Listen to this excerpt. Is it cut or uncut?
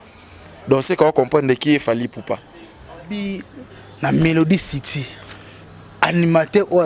cut